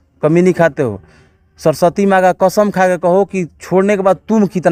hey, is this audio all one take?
yes; 0 cuts

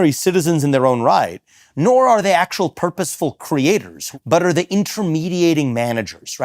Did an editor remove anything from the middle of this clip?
yes; 1 cut; at 4.0 s

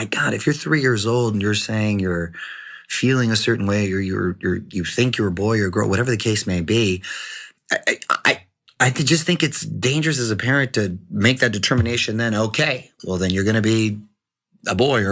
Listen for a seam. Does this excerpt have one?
no; 0 cuts

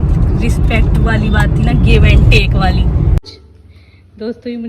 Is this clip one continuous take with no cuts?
no; 1 cut; at 3.3 s

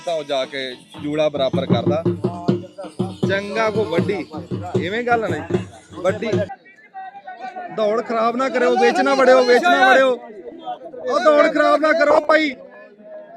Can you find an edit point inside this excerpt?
yes; 1 cut; at 6.5 s

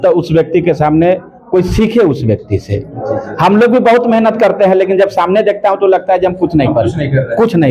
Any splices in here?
no; 0 cuts

